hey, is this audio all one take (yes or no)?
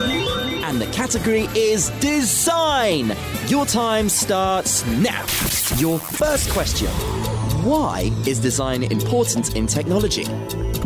yes